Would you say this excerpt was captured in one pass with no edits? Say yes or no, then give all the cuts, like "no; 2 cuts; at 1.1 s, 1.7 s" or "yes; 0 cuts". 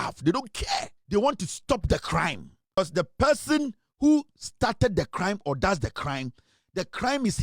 no; 2 cuts; at 0.9 s, 2.8 s